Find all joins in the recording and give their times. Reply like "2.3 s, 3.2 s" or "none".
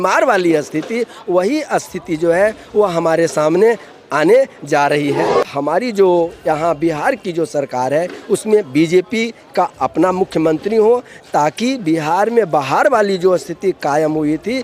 5.4 s